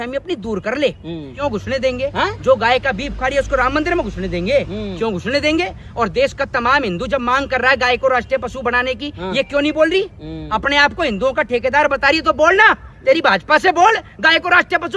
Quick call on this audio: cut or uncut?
cut